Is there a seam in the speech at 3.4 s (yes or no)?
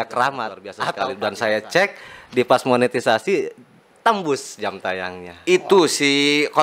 no